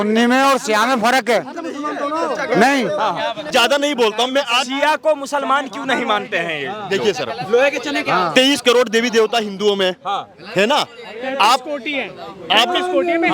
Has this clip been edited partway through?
yes; 1 cut; at 3.5 s

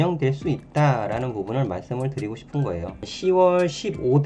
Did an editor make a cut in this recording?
yes; 1 cut; at 3.1 s

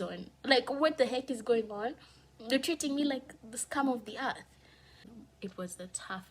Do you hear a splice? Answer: yes; 1 cut; at 5.1 s

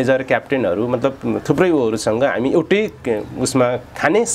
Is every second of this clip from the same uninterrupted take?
yes; 0 cuts

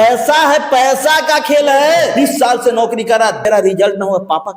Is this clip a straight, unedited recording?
no; 2 cuts; at 2.1 s, 3.4 s

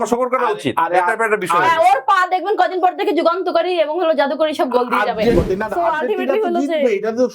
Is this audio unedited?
no; 1 cut; at 5.3 s

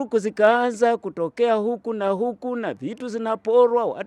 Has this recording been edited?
no; 0 cuts

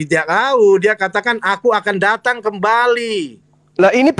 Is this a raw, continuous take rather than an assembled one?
yes; 0 cuts

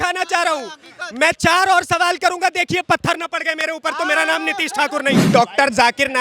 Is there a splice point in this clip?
yes; 1 cut; at 5.2 s

